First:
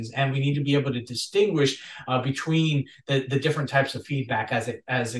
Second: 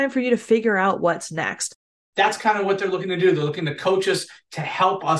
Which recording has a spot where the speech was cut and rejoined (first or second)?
second